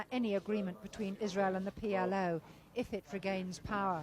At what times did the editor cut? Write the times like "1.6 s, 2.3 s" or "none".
none